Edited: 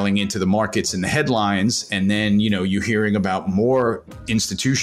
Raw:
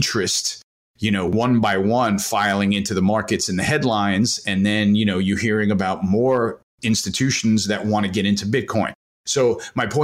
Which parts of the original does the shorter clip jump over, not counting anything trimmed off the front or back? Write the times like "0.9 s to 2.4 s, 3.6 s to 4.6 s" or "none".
none